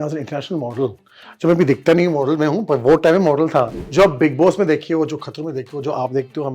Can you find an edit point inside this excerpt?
yes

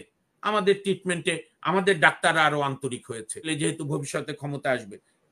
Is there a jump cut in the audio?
yes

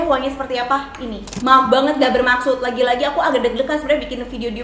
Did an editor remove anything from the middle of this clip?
yes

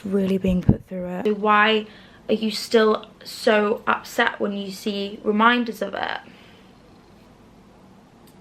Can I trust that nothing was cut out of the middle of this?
no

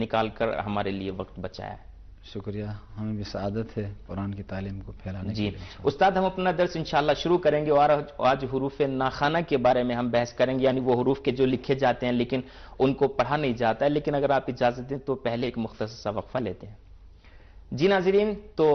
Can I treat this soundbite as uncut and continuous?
yes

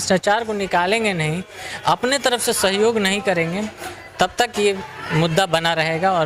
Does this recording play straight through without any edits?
yes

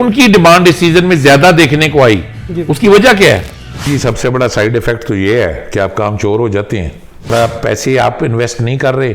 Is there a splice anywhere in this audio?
yes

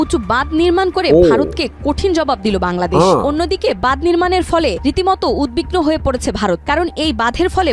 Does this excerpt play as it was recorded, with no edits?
yes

